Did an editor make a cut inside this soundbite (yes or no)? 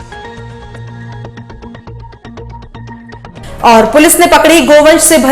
yes